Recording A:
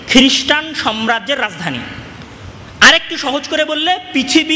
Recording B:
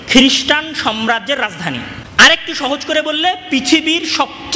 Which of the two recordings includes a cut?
B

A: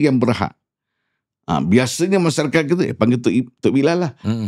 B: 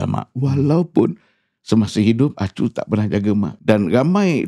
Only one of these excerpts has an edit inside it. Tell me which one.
B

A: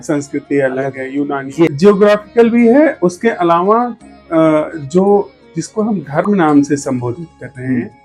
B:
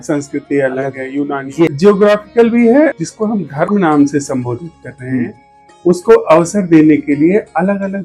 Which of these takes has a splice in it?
B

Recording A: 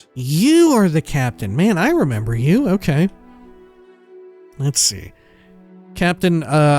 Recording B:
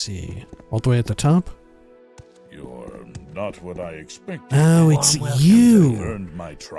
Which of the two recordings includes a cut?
A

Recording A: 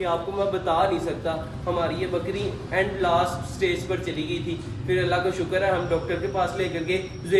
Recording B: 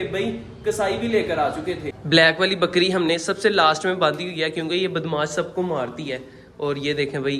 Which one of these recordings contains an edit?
B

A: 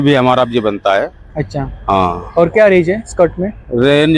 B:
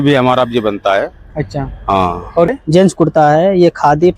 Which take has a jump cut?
B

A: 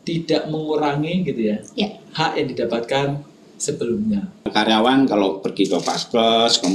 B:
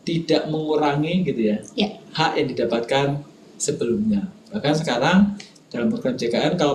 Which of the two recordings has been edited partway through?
A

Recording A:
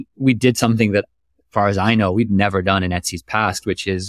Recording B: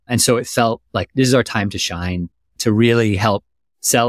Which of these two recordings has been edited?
B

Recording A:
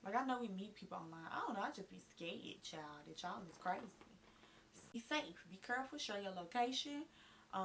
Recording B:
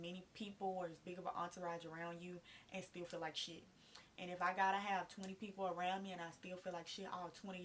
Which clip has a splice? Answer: A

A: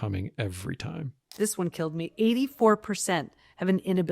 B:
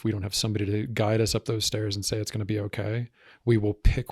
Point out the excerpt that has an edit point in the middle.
A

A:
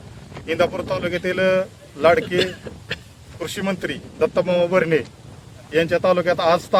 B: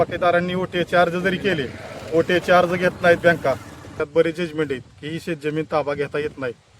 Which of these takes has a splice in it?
B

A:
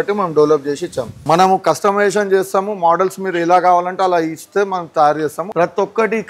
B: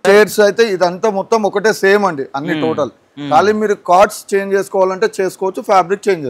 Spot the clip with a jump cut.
A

